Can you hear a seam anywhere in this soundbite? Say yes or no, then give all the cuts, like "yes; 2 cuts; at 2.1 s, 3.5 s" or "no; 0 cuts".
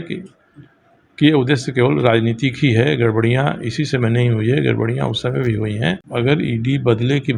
yes; 1 cut; at 6.0 s